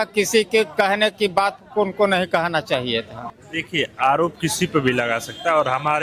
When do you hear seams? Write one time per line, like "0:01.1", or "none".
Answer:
0:03.4

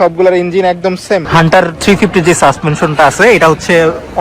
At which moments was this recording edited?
0:01.3

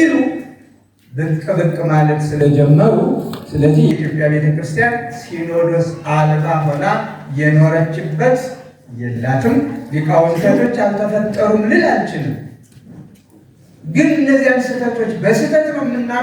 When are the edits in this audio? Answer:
0:10.4

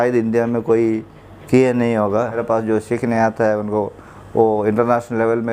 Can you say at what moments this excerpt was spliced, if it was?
0:02.4

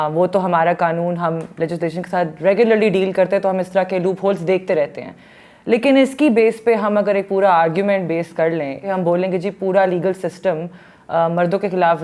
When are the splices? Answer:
0:08.9

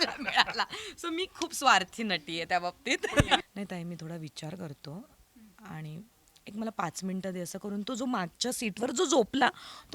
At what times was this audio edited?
0:03.4

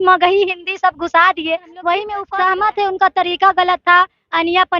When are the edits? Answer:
0:02.2

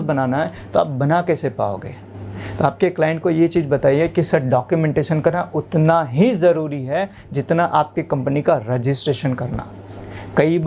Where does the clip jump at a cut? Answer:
none

